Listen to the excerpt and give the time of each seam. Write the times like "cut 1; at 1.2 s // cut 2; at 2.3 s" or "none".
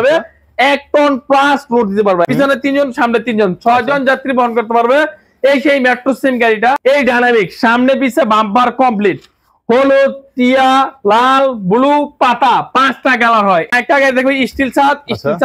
cut 1; at 2.3 s // cut 2; at 6.8 s // cut 3; at 13.7 s